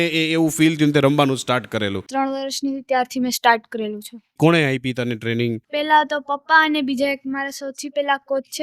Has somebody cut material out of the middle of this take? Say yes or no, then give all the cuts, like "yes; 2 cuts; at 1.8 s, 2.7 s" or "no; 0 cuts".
yes; 2 cuts; at 2.1 s, 4.3 s